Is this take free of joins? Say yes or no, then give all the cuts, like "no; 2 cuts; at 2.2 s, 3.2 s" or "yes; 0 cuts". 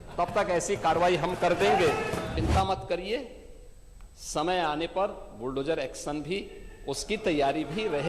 no; 1 cut; at 2.3 s